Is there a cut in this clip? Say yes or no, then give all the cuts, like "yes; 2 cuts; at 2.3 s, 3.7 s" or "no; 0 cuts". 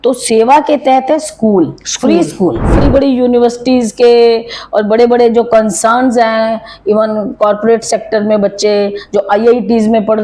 yes; 1 cut; at 2.8 s